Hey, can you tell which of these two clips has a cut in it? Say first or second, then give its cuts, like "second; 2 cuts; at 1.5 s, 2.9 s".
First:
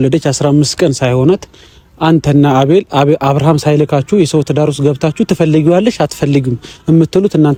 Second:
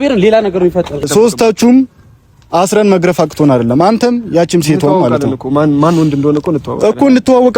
second; 1 cut; at 1.1 s